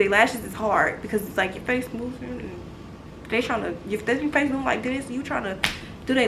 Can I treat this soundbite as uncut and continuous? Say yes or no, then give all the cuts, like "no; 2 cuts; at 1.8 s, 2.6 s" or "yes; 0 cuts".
yes; 0 cuts